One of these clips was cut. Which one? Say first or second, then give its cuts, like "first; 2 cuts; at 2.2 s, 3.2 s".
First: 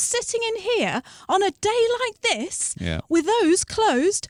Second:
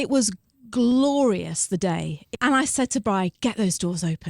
second; 1 cut; at 2.1 s